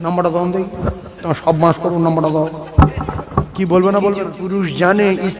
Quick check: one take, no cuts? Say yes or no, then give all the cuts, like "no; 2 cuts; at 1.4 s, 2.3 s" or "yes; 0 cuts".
no; 1 cut; at 4.3 s